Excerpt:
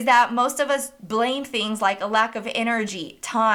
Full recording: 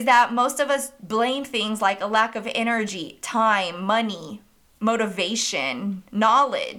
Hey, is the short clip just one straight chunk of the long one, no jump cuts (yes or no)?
yes